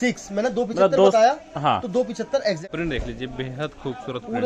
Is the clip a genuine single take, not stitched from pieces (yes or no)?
no